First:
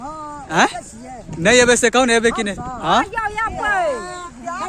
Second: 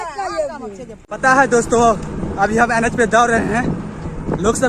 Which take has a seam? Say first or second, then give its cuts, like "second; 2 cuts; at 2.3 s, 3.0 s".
second; 1 cut; at 0.9 s